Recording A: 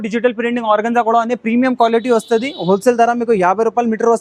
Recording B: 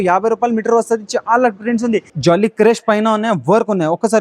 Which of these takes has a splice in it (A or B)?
B